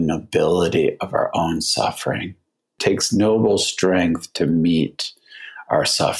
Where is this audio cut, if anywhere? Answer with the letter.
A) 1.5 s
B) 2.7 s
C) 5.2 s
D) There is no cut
B